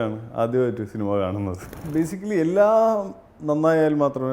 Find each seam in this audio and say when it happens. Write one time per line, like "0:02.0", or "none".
0:01.8